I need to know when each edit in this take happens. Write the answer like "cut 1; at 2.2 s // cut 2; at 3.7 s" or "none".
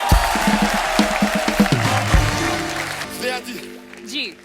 cut 1; at 3.0 s

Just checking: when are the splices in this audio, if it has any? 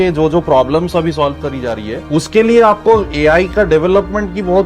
cut 1; at 1.9 s

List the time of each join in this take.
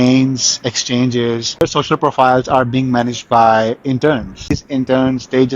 cut 1; at 1.6 s // cut 2; at 4.6 s

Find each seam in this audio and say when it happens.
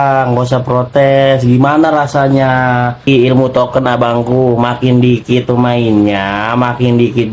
cut 1; at 3.1 s

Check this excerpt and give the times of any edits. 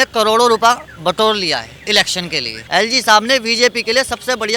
cut 1; at 2.6 s

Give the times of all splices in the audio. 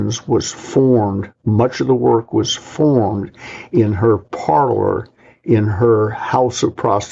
none

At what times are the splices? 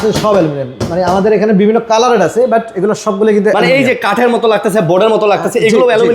none

